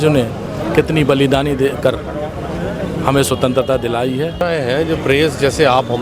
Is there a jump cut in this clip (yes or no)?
yes